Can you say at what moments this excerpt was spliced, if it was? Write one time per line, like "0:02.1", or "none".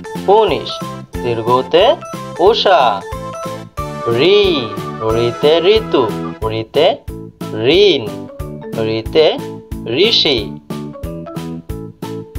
0:10.4